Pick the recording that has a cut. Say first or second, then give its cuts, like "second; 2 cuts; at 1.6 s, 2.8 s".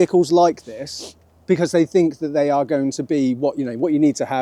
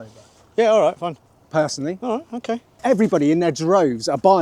second; 1 cut; at 2.8 s